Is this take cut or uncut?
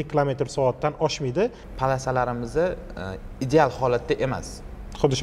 cut